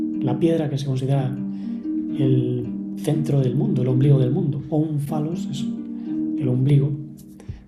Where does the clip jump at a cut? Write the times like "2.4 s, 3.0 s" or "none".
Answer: none